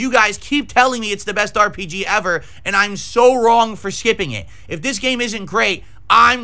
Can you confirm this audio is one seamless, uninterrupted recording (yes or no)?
yes